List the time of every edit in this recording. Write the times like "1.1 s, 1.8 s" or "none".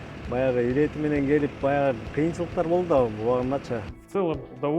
3.9 s